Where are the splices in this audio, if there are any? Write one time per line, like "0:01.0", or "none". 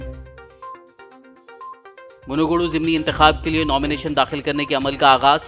0:01.6

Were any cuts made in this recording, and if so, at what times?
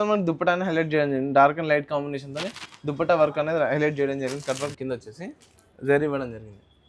0:04.7

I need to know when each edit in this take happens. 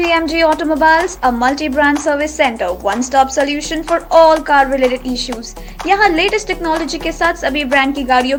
none

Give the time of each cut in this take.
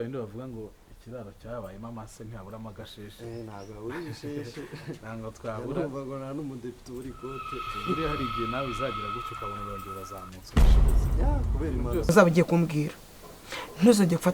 0:12.1

